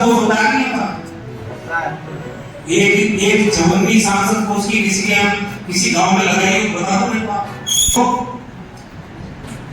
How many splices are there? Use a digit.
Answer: 1